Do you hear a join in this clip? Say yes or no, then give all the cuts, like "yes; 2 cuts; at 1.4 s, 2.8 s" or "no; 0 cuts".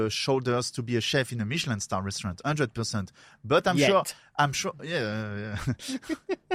no; 0 cuts